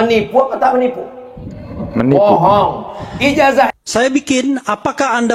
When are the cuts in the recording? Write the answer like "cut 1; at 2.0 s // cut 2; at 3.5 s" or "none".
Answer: cut 1; at 3.7 s